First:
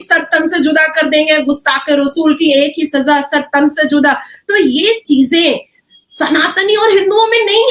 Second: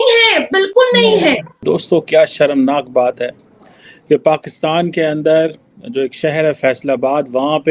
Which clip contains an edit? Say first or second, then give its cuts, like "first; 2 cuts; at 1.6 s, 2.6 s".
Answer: second; 1 cut; at 1.5 s